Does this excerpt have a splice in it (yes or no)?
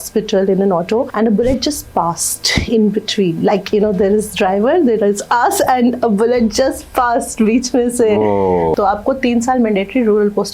yes